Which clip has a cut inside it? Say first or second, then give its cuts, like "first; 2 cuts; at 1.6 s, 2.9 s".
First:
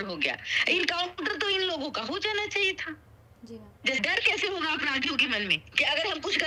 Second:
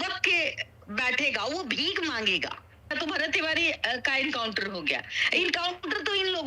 second; 1 cut; at 2.9 s